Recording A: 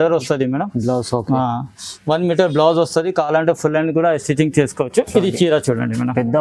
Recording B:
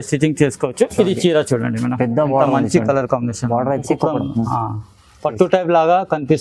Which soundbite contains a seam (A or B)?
B